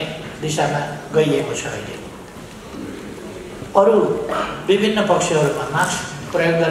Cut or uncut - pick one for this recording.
uncut